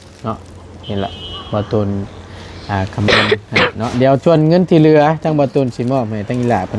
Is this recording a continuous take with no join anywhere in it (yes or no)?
yes